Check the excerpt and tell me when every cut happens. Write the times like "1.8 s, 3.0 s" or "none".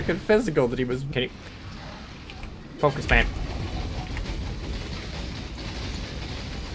1.1 s